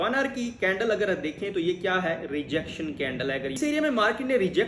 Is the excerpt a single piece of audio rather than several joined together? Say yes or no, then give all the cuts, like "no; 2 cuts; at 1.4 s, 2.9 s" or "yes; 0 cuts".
no; 1 cut; at 3.6 s